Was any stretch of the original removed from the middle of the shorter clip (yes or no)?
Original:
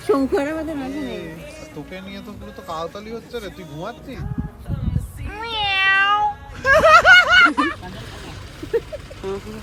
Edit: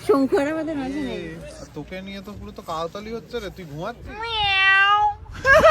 yes